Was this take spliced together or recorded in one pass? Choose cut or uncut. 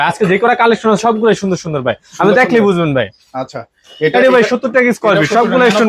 uncut